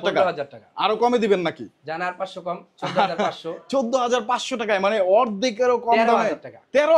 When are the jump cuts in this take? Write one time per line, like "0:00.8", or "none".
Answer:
none